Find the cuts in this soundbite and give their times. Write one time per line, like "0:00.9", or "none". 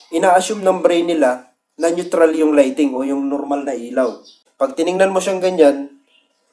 0:04.4